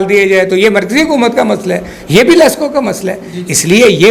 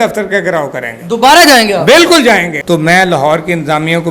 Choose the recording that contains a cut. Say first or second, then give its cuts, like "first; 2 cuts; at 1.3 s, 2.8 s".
second; 1 cut; at 2.5 s